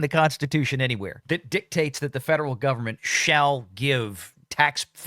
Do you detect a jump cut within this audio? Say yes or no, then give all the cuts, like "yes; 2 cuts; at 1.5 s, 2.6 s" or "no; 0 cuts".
yes; 1 cut; at 1.1 s